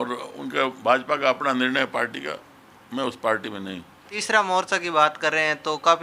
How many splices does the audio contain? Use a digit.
1